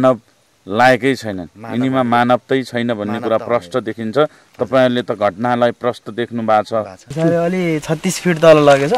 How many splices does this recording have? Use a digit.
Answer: 1